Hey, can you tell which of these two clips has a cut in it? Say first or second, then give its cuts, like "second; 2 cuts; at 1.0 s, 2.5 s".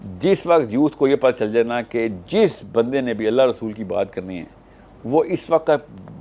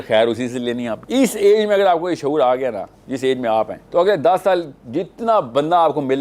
second; 2 cuts; at 0.9 s, 3.8 s